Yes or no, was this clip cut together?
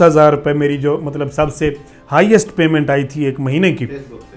no